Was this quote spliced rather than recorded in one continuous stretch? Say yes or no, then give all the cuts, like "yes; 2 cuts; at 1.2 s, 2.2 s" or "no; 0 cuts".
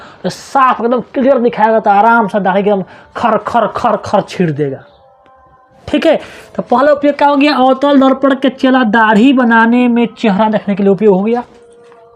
no; 0 cuts